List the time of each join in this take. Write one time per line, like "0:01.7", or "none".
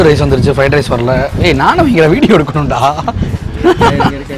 none